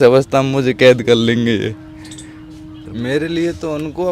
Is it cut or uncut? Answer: cut